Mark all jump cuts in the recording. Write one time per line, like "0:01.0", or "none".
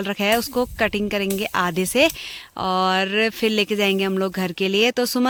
none